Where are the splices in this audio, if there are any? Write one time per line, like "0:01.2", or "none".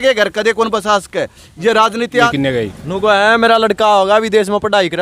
0:02.3